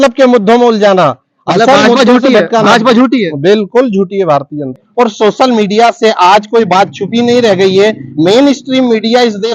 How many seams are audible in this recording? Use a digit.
1